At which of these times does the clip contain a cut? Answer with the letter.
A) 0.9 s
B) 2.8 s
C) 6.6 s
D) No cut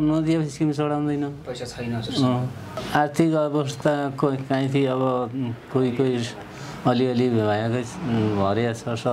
B